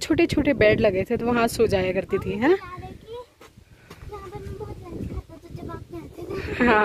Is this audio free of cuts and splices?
yes; 0 cuts

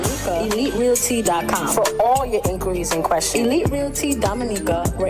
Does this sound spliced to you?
no; 0 cuts

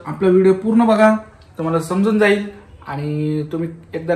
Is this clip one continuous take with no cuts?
yes; 0 cuts

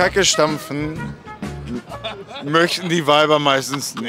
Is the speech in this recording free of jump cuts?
yes; 0 cuts

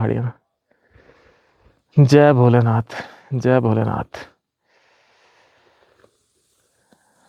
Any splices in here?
no; 0 cuts

